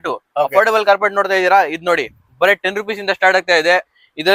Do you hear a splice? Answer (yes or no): no